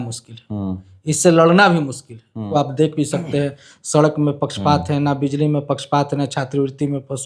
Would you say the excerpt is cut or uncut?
cut